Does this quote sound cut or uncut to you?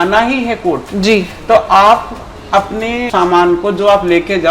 cut